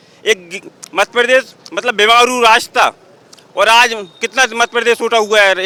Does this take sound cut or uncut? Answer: uncut